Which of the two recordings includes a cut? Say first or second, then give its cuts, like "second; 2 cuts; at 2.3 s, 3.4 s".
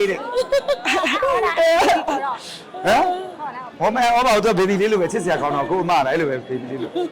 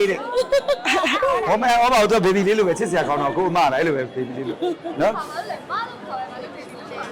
second; 1 cut; at 1.4 s